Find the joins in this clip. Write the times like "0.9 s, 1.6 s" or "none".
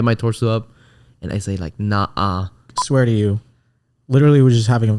2.7 s